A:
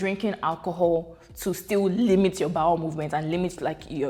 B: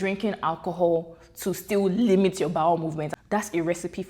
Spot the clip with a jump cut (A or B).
B